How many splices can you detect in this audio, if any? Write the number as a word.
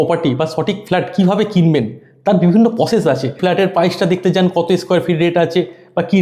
one